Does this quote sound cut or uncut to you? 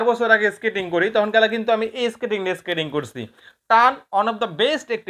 uncut